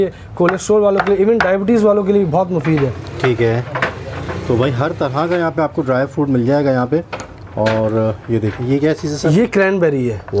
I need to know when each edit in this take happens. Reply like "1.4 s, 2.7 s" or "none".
none